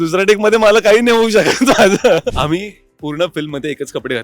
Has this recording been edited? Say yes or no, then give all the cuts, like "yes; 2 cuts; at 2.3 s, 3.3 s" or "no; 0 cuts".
yes; 1 cut; at 2.3 s